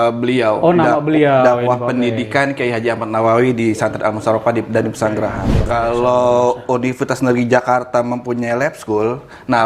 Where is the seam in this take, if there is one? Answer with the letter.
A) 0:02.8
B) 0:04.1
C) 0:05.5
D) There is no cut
C